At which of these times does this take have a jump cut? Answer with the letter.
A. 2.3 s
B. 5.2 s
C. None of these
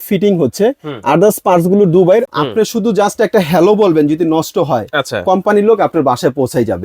A